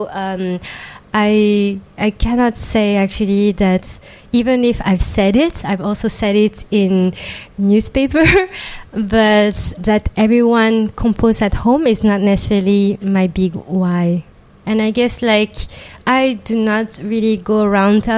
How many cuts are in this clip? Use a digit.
3